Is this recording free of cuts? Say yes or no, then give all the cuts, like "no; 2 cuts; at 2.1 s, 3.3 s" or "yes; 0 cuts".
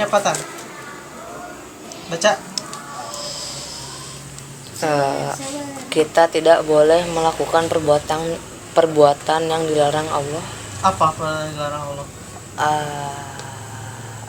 yes; 0 cuts